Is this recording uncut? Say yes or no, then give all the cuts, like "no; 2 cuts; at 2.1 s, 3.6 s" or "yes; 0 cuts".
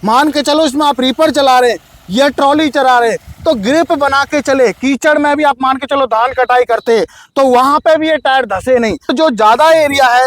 no; 1 cut; at 9.1 s